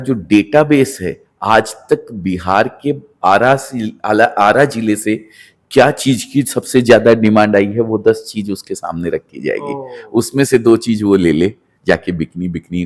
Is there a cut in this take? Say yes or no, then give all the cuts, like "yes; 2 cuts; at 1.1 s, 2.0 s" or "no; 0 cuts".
no; 0 cuts